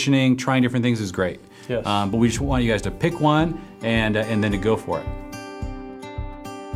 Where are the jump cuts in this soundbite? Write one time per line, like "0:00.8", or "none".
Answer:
0:05.1